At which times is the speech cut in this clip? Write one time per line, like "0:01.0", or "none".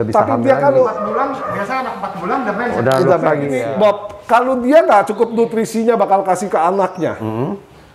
0:03.7